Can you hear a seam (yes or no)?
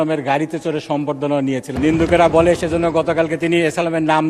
yes